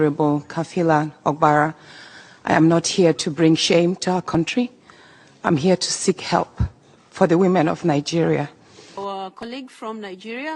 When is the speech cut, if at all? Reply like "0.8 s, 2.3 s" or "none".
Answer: 8.9 s